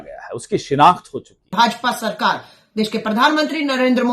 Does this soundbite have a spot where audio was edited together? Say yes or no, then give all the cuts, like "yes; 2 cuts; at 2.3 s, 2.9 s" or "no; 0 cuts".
yes; 1 cut; at 1.4 s